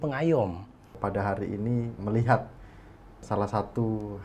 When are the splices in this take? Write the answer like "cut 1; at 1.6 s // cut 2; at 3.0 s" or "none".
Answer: cut 1; at 0.9 s // cut 2; at 1.9 s // cut 3; at 3.2 s